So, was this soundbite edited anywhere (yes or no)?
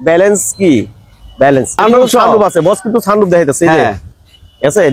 yes